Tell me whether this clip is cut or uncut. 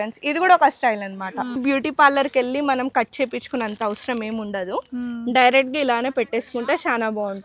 cut